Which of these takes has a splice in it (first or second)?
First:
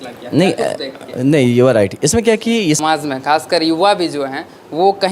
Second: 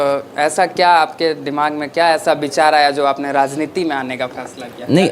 first